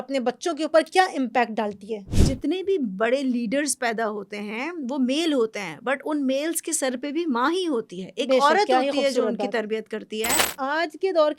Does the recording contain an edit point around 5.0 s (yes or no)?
no